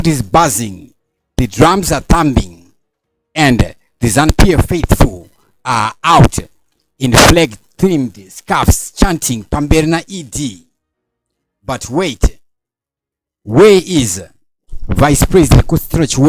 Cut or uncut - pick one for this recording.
cut